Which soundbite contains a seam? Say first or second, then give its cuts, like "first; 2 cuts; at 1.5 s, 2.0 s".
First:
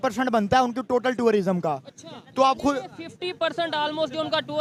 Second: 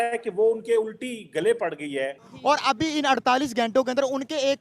second; 1 cut; at 2.3 s